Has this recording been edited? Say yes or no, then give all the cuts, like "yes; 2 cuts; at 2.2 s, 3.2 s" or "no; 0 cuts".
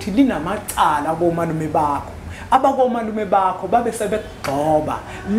no; 0 cuts